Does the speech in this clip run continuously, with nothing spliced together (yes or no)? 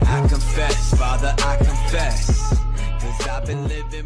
yes